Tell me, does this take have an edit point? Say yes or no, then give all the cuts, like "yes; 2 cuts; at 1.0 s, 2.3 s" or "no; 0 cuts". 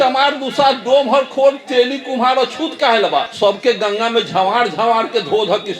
yes; 1 cut; at 3.3 s